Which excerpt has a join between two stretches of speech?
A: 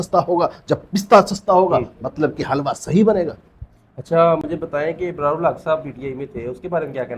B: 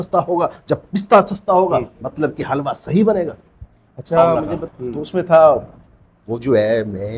B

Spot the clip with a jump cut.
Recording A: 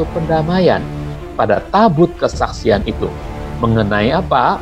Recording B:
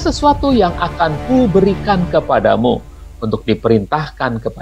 A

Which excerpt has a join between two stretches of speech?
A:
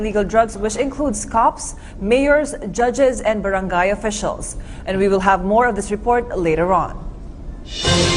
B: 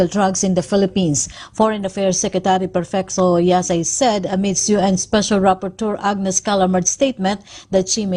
A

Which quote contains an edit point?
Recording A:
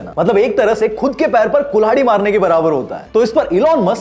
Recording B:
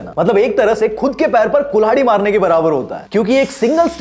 A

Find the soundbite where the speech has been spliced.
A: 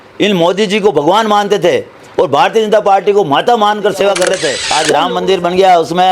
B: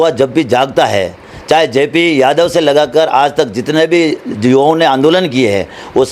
A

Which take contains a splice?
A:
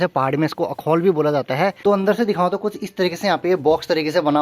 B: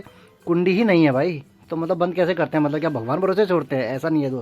A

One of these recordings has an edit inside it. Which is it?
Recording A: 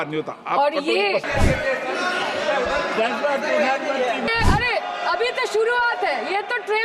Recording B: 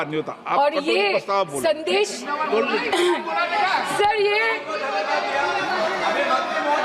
A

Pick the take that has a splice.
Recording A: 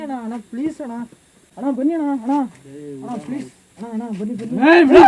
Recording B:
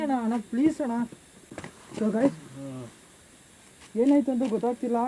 A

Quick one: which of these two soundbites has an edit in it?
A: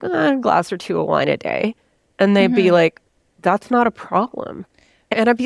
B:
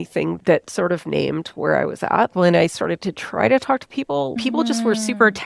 B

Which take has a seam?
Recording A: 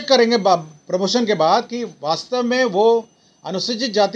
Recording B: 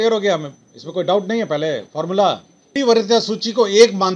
B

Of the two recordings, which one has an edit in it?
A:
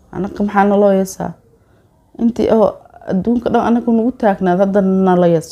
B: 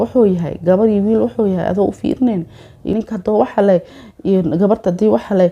B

